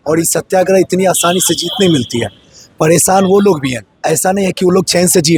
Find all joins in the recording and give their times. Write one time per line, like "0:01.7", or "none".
none